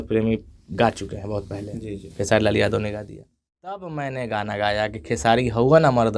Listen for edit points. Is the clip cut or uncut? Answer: cut